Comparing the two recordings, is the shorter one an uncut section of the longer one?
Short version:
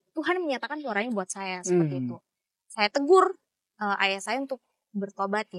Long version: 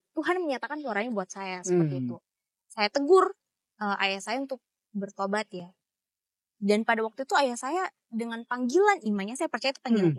yes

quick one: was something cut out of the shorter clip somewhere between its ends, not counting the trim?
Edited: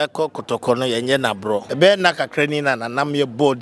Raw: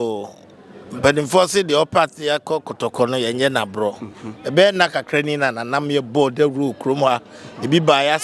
yes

